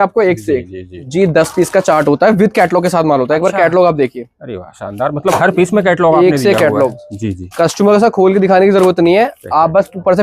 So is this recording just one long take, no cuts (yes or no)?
no